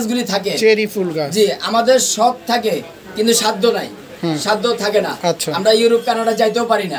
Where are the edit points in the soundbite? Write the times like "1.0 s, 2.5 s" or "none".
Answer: none